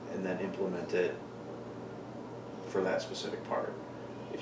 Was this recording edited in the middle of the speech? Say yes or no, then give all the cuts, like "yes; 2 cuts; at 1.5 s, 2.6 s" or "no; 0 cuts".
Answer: no; 0 cuts